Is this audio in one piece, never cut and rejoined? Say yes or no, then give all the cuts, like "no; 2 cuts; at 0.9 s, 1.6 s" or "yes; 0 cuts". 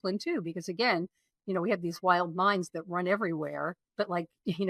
yes; 0 cuts